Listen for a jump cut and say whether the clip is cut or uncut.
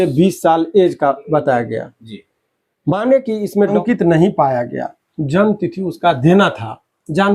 cut